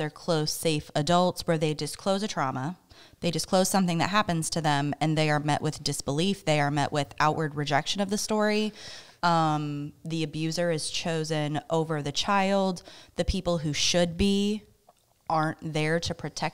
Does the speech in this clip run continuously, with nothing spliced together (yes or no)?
yes